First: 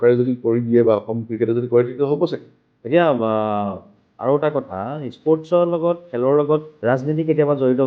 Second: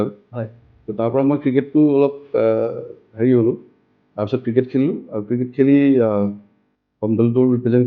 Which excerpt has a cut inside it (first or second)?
first